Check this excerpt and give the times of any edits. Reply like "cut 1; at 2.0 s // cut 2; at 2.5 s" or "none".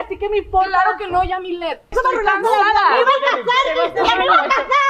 cut 1; at 1.9 s